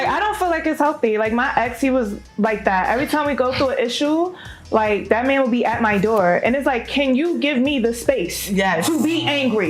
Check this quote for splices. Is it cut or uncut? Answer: uncut